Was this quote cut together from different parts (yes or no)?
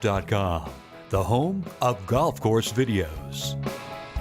yes